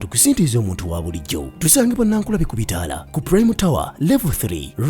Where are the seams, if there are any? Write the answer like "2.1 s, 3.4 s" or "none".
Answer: 1.0 s